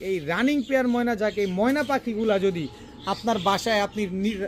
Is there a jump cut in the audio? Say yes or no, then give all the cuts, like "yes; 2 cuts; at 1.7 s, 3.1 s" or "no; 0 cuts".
no; 0 cuts